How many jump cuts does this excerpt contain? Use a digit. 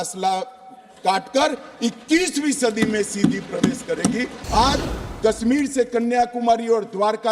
1